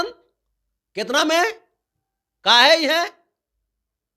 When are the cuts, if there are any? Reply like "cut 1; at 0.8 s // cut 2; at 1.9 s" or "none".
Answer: none